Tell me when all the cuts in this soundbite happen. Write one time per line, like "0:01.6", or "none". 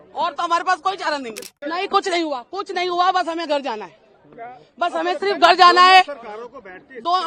0:01.4